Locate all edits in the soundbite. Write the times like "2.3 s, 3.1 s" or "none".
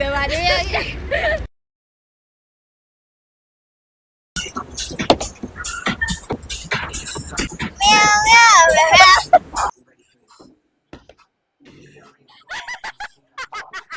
none